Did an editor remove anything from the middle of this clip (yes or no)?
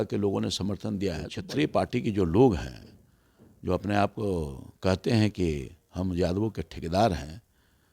yes